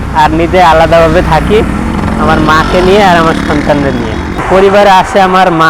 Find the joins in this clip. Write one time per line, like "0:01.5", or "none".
0:04.4